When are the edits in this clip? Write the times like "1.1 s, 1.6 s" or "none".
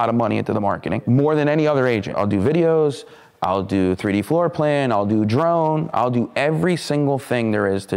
1.0 s, 2.1 s